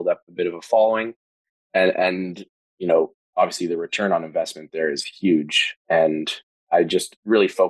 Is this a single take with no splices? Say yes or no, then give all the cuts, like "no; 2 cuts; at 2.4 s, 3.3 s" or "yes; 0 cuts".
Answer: yes; 0 cuts